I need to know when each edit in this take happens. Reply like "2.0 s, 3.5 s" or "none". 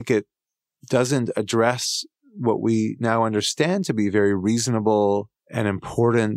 5.4 s